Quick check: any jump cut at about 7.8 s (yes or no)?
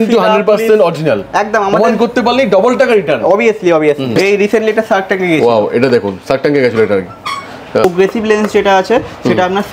yes